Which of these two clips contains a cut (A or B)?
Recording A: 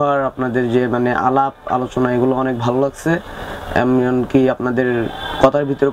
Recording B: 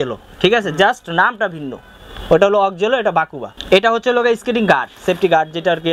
B